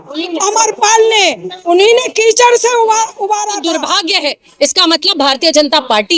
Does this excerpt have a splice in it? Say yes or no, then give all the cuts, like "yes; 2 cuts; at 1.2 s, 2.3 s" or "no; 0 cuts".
yes; 1 cut; at 3.5 s